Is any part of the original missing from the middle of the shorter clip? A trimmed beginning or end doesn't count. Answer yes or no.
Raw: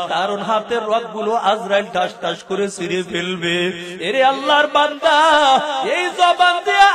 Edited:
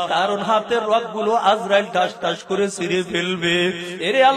no